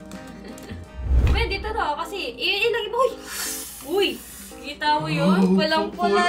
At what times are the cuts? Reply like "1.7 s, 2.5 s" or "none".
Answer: 1.3 s